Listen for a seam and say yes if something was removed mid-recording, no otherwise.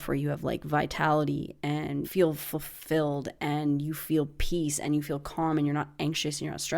yes